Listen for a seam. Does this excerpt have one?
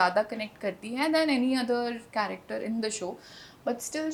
no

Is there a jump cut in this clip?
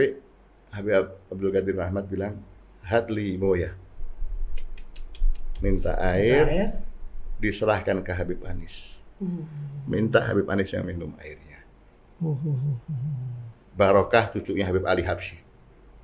no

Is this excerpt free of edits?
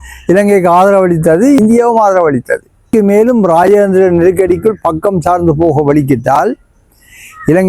no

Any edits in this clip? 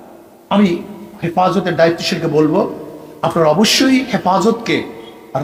no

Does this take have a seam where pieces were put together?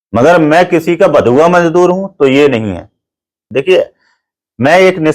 yes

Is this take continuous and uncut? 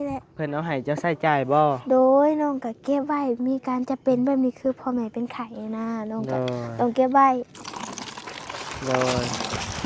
yes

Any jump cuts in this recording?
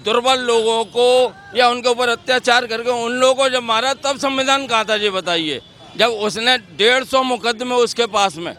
no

